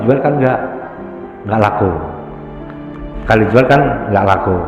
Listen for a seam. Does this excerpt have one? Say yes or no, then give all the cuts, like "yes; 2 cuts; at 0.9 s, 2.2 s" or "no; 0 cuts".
no; 0 cuts